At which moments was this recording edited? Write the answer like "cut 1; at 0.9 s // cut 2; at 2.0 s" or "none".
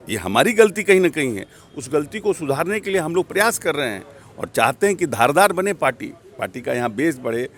none